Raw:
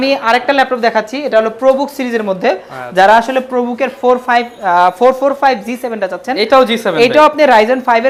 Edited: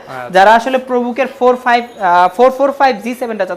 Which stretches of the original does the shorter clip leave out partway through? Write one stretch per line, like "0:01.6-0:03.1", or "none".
none